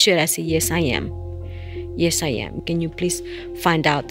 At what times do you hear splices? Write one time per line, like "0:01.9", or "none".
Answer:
none